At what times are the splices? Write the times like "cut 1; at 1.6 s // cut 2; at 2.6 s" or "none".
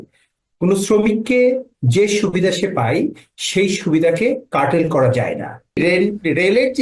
cut 1; at 5.8 s